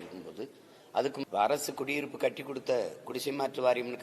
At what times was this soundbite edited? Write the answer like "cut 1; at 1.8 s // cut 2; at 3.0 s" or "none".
cut 1; at 1.2 s